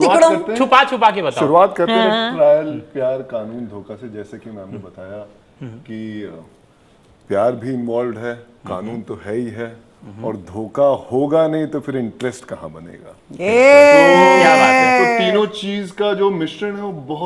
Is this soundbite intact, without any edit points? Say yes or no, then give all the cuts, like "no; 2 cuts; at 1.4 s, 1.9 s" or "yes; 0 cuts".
yes; 0 cuts